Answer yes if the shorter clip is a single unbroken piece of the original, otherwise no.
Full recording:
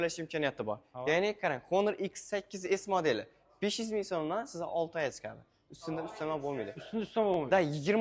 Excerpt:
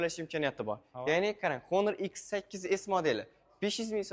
yes